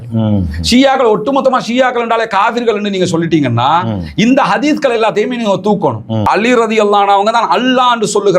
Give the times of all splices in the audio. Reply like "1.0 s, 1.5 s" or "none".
6.2 s

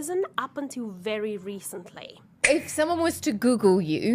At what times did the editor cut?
2.5 s

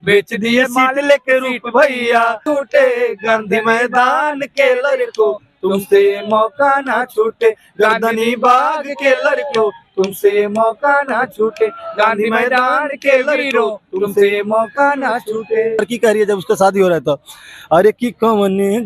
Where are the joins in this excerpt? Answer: 2.4 s, 15.8 s

